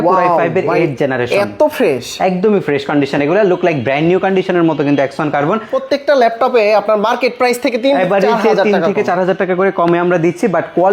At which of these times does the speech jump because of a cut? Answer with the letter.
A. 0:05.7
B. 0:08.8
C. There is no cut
A